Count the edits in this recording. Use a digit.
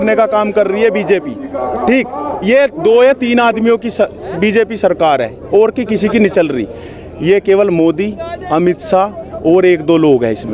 0